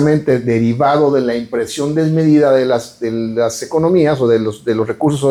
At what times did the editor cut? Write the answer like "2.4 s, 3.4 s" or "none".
none